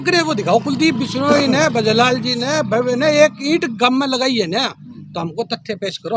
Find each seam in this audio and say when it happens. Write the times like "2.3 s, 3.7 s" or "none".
none